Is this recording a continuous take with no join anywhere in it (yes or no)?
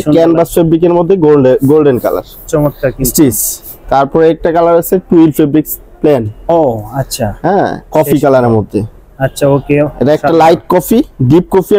yes